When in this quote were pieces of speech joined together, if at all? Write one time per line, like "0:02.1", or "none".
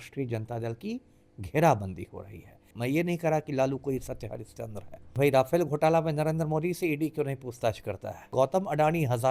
0:02.7
0:05.1
0:08.3

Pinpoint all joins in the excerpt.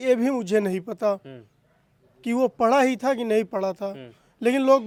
none

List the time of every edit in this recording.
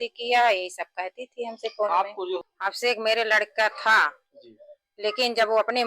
0:02.4

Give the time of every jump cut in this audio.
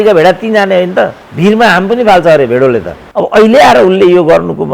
0:01.2
0:03.0

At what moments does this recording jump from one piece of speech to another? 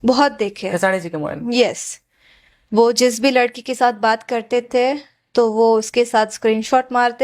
0:01.2

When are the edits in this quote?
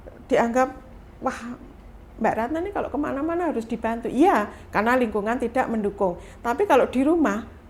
none

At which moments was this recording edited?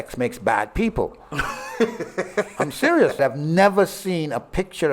0:03.2

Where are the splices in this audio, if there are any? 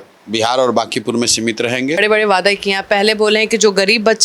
0:02.0

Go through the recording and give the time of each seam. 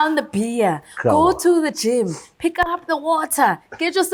none

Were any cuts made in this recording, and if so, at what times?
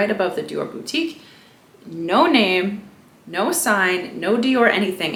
none

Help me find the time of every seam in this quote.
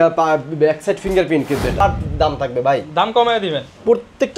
0:01.8

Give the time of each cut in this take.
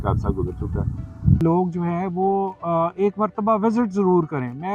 0:01.4

